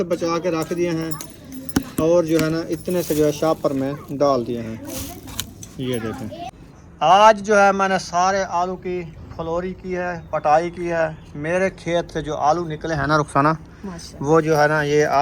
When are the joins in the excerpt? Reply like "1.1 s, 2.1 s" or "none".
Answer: none